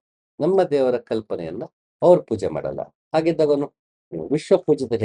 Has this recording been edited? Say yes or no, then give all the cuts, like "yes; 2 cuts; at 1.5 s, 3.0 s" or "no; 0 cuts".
no; 0 cuts